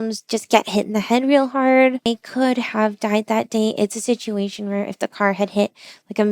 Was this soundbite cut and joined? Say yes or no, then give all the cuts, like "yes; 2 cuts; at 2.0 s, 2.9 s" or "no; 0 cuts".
yes; 1 cut; at 2.1 s